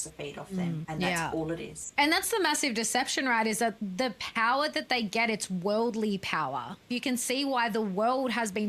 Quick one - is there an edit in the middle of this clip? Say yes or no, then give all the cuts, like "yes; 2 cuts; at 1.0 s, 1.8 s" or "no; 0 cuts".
yes; 4 cuts; at 0.8 s, 1.9 s, 3.8 s, 6.9 s